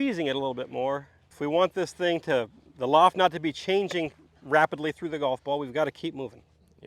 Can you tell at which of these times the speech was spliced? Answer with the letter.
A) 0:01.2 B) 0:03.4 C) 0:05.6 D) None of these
A